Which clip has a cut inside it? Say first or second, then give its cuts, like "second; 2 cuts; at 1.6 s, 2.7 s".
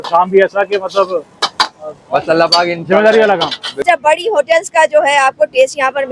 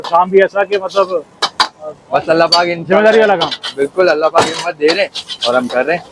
first; 1 cut; at 3.8 s